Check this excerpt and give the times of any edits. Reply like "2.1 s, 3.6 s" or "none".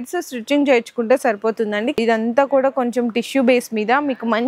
1.9 s

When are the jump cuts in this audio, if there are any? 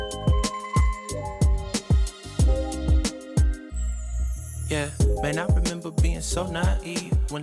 none

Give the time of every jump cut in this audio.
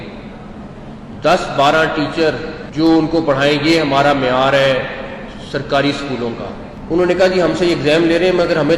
2.6 s, 6.7 s

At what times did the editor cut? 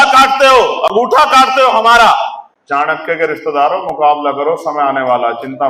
2.5 s

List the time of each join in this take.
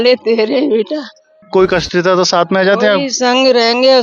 1.4 s

